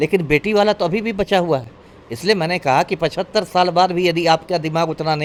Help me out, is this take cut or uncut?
uncut